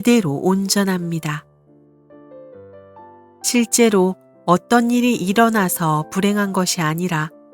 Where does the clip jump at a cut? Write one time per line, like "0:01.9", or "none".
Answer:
0:01.5
0:02.9